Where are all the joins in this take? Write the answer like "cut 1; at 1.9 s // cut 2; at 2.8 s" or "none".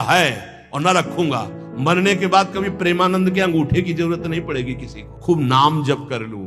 cut 1; at 5.2 s